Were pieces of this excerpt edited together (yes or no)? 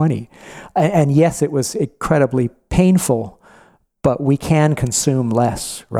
no